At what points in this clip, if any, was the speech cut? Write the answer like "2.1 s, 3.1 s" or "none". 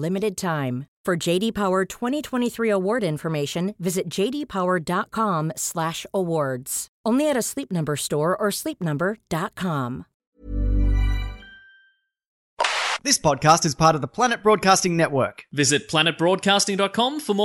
10.3 s, 12.6 s